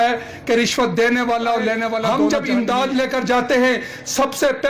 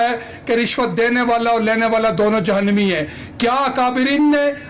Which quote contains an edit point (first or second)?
first